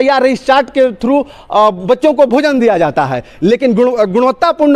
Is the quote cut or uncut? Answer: uncut